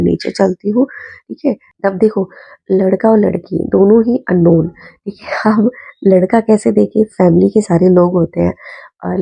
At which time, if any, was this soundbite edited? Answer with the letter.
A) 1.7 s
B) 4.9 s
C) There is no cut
A